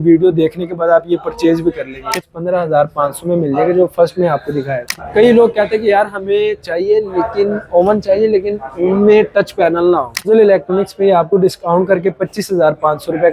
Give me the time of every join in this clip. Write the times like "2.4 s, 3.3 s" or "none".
2.1 s, 5.0 s, 10.3 s

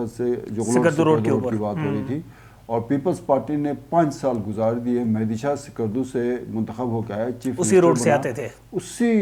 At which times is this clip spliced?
none

